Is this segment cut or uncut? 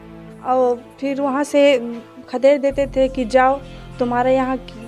uncut